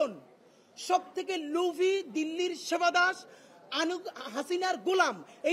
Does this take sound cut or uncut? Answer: uncut